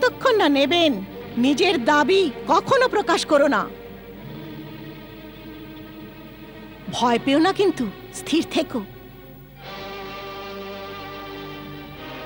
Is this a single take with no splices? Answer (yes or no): yes